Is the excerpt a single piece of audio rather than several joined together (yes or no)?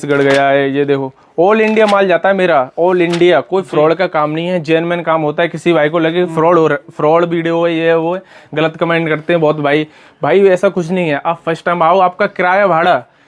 yes